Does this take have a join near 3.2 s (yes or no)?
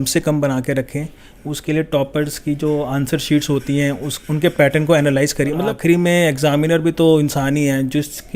no